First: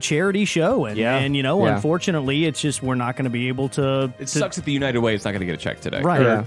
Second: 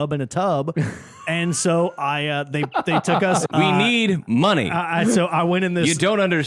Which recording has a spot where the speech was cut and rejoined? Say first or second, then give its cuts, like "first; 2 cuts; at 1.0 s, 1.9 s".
second; 1 cut; at 3.5 s